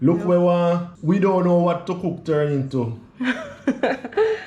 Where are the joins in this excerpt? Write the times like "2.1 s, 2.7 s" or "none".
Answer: 0.9 s